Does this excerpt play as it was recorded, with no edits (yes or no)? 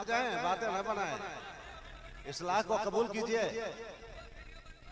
yes